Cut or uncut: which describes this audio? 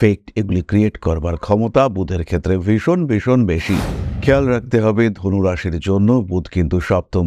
cut